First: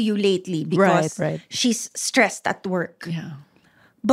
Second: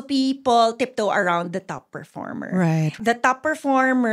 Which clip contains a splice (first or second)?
second